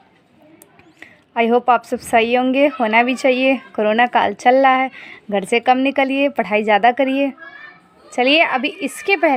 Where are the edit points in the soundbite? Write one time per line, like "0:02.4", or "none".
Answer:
none